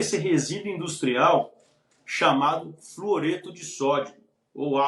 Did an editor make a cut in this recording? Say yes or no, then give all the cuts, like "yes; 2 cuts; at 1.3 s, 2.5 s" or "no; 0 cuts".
no; 0 cuts